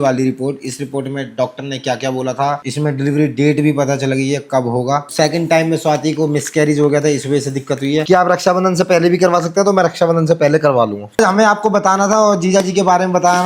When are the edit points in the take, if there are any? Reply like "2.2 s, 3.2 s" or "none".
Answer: 2.6 s, 5.1 s, 8.1 s, 11.2 s